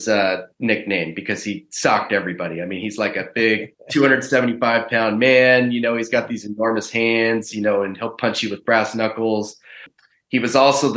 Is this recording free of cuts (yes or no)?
no